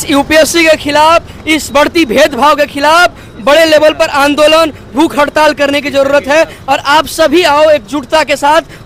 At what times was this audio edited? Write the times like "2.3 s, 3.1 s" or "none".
none